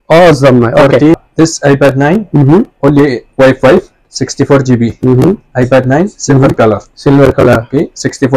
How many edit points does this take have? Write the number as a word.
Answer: one